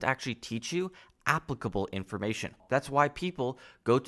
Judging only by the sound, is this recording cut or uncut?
cut